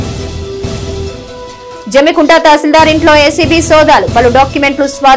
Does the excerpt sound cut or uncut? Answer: cut